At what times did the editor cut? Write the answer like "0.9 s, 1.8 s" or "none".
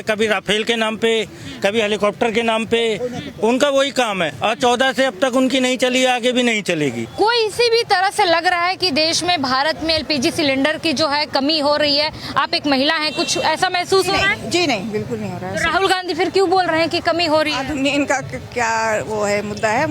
7.0 s